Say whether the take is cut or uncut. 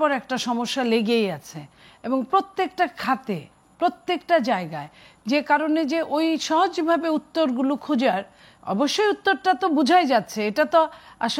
uncut